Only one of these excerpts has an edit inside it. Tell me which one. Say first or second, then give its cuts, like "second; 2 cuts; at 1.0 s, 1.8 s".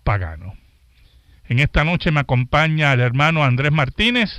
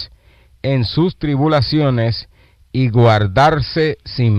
second; 1 cut; at 3.4 s